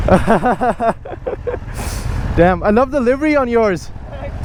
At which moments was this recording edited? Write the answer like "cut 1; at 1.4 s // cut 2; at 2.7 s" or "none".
none